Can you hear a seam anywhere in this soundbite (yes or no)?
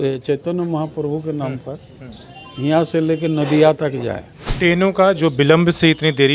yes